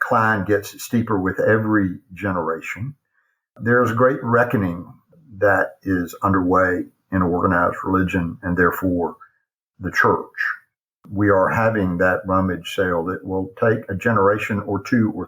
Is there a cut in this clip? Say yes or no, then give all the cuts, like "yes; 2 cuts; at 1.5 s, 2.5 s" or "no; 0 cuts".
no; 0 cuts